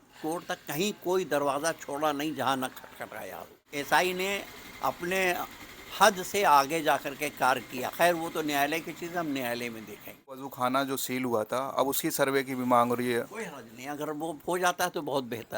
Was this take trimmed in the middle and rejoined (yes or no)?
yes